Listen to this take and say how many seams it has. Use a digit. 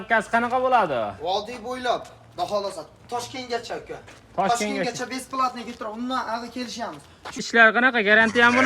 1